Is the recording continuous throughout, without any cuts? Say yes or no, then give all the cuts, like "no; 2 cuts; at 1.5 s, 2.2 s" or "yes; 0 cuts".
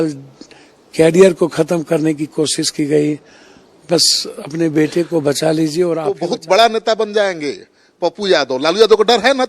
no; 1 cut; at 6.1 s